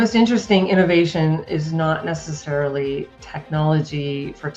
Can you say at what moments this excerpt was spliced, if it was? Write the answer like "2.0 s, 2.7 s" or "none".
none